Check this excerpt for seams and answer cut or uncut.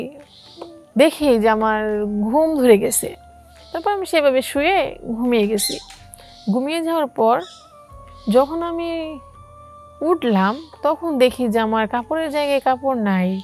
uncut